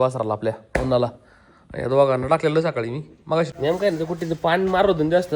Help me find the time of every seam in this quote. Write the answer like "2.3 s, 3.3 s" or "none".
3.5 s

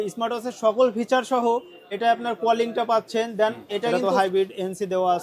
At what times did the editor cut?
4.0 s

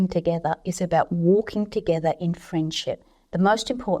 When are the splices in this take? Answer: none

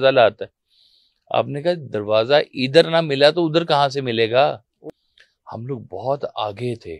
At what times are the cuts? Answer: 4.7 s

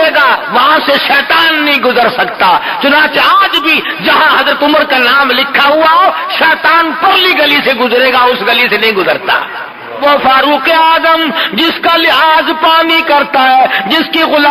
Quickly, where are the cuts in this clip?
10.0 s

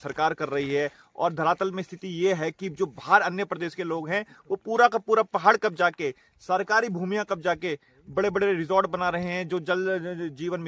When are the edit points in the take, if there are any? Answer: none

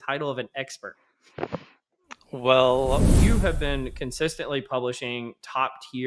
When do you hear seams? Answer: 3.2 s

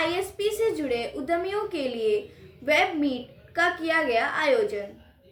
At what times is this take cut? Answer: none

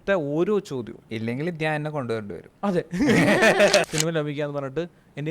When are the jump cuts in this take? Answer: 1.0 s, 2.4 s, 3.9 s

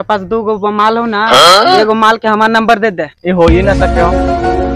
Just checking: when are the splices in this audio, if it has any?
none

